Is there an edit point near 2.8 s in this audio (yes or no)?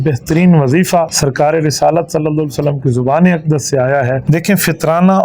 no